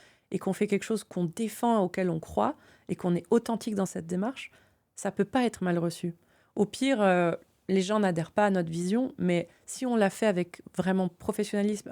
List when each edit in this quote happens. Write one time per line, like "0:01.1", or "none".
0:01.1